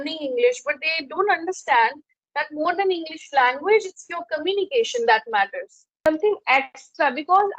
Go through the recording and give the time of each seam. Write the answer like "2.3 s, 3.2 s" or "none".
6.0 s